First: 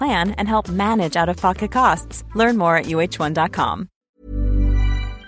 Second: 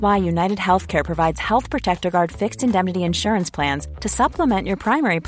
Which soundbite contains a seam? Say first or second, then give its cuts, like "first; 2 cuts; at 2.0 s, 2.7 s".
first; 1 cut; at 3.9 s